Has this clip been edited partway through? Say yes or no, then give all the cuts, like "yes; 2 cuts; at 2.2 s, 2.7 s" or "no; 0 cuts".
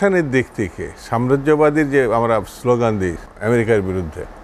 yes; 1 cut; at 3.3 s